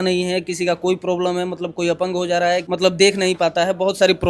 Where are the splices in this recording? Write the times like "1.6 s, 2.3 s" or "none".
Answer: 2.7 s